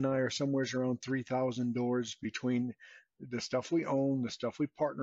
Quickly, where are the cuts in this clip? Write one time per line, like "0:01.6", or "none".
none